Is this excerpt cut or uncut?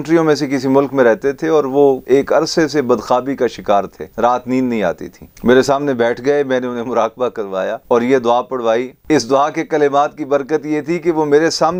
cut